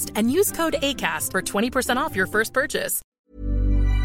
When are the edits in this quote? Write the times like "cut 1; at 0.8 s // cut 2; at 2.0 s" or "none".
cut 1; at 3.0 s